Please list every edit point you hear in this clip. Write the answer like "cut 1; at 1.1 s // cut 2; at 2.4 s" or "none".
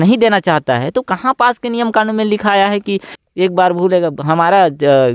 cut 1; at 3.1 s

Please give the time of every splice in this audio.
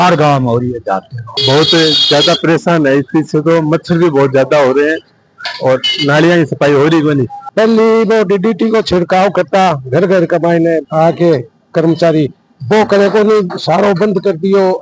cut 1; at 1.4 s // cut 2; at 7.5 s

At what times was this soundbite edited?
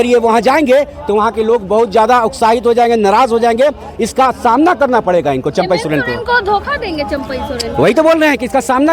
none

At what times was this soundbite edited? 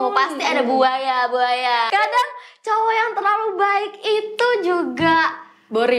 cut 1; at 1.9 s

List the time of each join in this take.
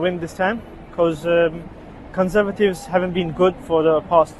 none

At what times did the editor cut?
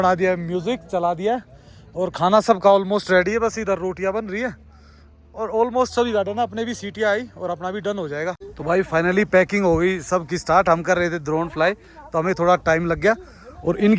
cut 1; at 8.6 s

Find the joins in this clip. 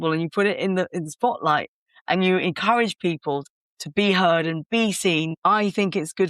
cut 1; at 3.5 s // cut 2; at 5.3 s

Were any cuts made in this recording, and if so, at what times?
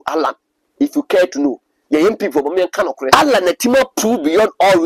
cut 1; at 3.1 s

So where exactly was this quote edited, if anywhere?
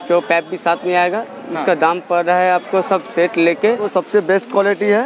cut 1; at 3.8 s

